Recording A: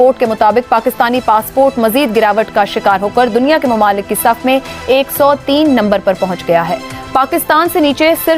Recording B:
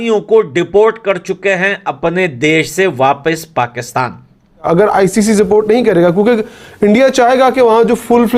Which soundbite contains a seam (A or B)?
B